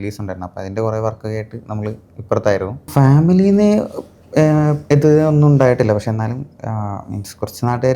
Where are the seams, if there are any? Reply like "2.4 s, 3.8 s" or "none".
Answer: 2.9 s